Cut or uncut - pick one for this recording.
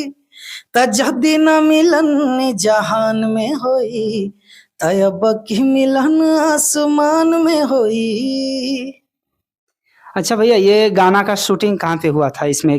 uncut